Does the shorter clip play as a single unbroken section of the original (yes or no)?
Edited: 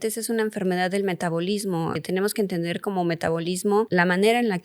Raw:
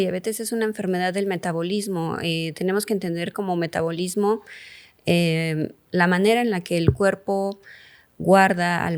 no